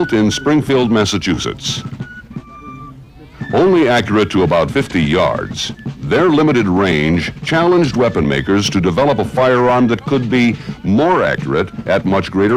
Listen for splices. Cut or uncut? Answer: uncut